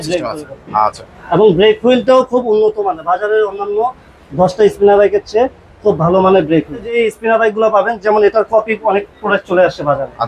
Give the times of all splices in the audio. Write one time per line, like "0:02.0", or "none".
0:07.0

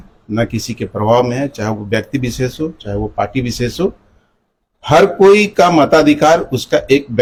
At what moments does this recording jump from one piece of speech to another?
none

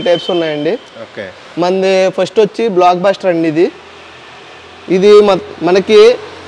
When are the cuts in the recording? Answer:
none

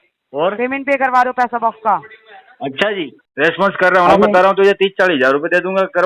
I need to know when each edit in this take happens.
0:03.2

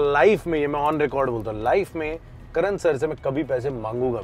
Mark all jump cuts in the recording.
none

